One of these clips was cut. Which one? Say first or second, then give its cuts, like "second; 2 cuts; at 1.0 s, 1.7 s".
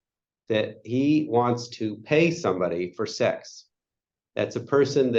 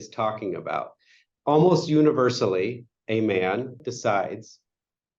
second; 2 cuts; at 1.3 s, 3.8 s